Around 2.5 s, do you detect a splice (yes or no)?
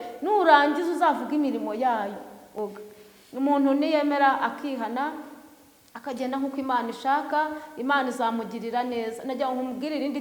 yes